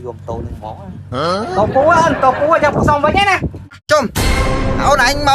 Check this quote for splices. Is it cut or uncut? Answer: cut